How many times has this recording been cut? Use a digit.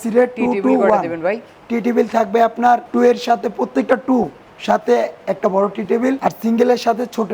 2